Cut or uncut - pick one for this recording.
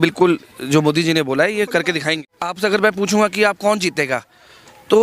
cut